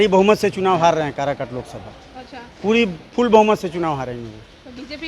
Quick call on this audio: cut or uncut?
uncut